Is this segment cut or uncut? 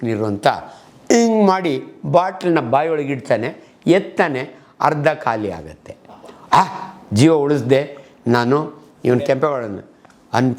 uncut